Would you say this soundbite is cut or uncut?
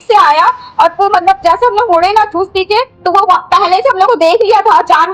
uncut